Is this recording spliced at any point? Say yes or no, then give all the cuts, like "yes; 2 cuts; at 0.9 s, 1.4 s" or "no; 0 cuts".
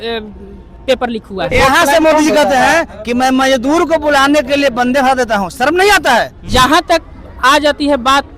yes; 2 cuts; at 1.5 s, 6.5 s